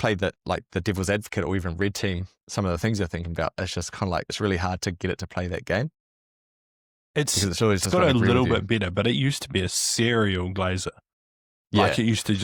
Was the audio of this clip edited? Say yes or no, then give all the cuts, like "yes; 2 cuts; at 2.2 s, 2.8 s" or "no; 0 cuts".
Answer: no; 0 cuts